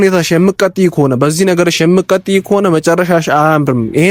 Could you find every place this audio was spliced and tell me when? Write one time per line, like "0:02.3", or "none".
none